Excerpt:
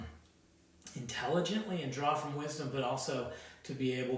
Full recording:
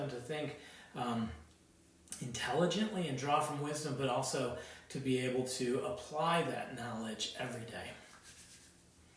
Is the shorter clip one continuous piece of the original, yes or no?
yes